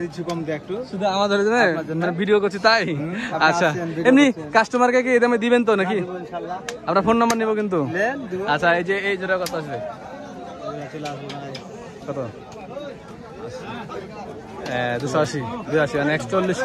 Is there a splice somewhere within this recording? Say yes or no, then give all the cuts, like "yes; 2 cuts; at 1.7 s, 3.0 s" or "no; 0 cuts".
no; 0 cuts